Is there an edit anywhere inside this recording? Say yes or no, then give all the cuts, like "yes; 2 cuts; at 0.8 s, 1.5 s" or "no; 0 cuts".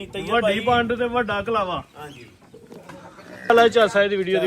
yes; 1 cut; at 3.5 s